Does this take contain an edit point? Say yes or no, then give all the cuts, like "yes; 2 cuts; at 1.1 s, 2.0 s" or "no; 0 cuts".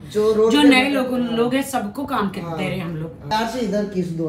yes; 1 cut; at 3.3 s